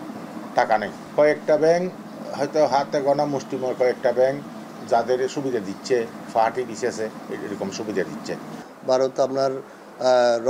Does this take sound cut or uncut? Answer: uncut